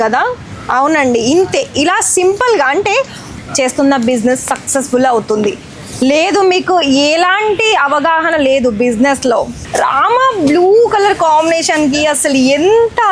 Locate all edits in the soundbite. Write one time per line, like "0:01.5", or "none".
0:03.2
0:09.6